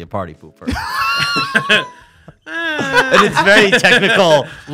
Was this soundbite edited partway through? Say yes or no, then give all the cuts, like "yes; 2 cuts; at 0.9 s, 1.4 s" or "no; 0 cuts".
no; 0 cuts